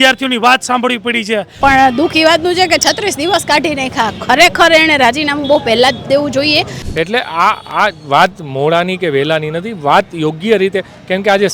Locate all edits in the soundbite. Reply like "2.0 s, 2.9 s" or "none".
1.6 s, 6.8 s